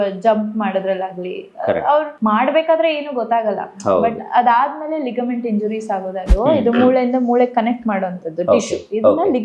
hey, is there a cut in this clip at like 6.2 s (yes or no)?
yes